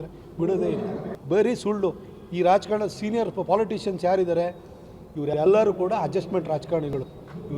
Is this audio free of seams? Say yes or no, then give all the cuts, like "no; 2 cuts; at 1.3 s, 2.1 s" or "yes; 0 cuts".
no; 1 cut; at 1.1 s